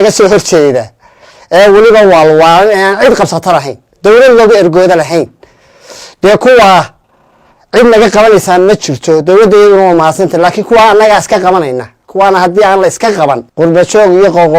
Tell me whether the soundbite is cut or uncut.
cut